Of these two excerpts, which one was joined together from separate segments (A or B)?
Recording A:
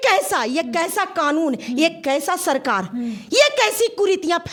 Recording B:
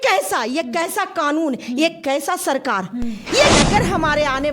B